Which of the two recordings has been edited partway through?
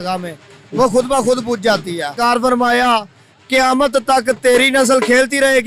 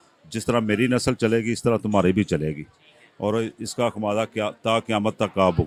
first; 1 cut; at 2.2 s

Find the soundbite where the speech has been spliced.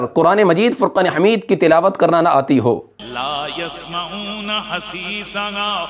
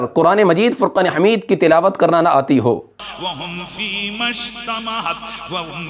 second; 1 cut; at 3.0 s

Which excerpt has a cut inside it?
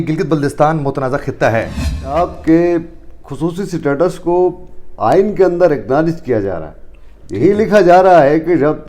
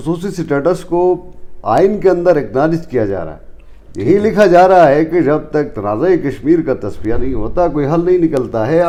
first; 1 cut; at 2.1 s

